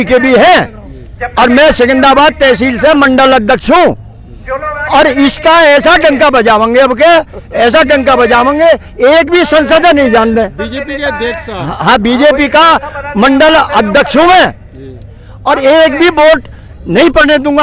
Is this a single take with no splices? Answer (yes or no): yes